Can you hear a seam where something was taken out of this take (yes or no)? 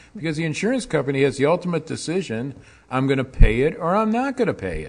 no